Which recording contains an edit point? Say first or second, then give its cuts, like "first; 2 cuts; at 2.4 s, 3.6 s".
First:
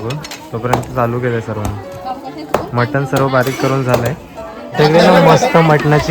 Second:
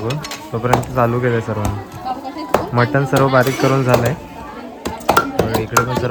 first; 1 cut; at 4.6 s